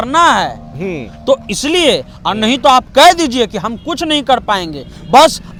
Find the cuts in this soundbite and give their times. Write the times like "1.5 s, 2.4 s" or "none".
none